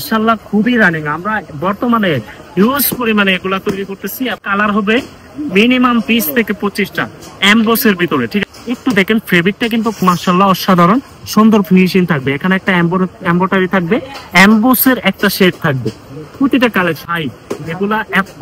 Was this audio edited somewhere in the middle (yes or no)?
yes